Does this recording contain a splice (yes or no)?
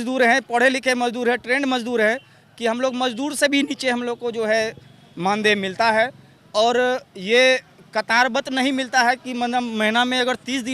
no